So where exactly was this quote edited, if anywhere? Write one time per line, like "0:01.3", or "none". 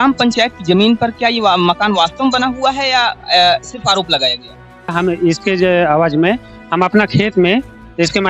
0:04.9